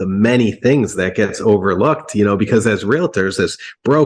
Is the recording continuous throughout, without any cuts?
yes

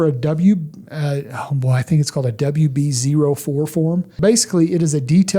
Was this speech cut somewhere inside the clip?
yes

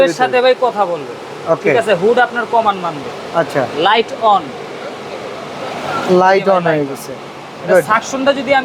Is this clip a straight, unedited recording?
yes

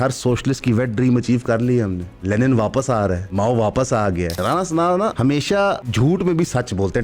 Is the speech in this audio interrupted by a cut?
yes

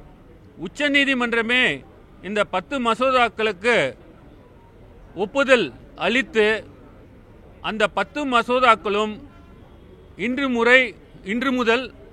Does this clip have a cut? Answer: no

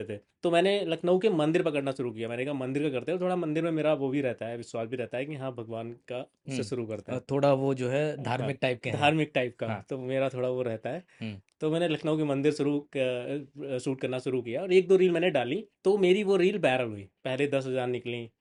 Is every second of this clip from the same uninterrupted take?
yes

